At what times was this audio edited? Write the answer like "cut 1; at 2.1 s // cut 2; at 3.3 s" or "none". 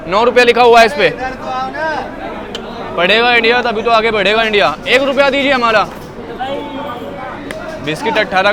none